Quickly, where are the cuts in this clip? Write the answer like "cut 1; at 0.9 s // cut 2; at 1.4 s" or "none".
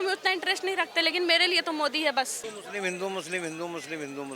cut 1; at 2.5 s